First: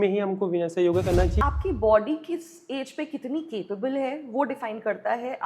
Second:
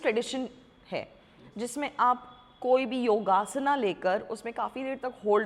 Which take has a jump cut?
first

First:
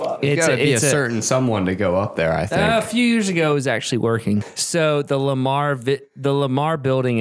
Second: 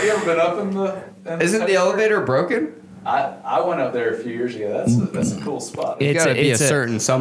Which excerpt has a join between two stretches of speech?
first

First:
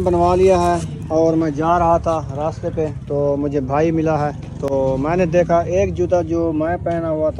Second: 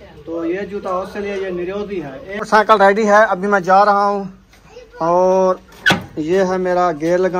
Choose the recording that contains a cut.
second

